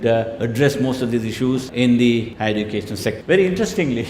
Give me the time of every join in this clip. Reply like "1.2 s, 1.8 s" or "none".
1.7 s, 2.7 s